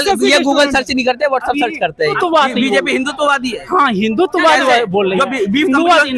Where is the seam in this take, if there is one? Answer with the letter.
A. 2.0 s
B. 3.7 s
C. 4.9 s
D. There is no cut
A